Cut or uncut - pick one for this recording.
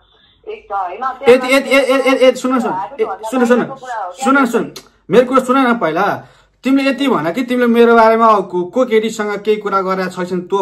uncut